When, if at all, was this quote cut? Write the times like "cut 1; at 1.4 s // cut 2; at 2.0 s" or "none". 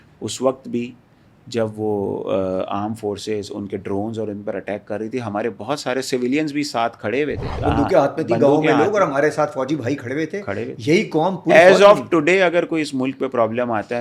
cut 1; at 7.6 s